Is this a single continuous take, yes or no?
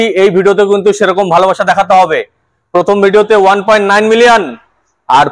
yes